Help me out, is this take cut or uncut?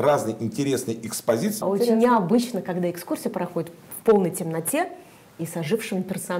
cut